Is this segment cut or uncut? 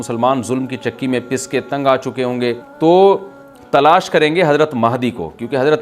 cut